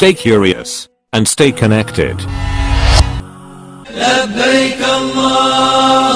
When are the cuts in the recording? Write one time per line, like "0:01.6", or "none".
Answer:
0:03.8